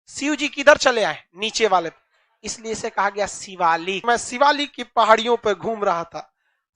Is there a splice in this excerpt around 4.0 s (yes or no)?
yes